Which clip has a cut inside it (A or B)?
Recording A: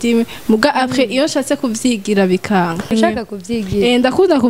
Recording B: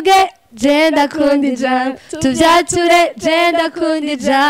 A